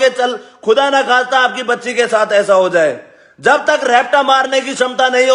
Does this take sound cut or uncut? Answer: uncut